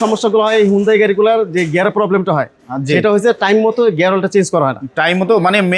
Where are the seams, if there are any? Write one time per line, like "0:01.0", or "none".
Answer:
none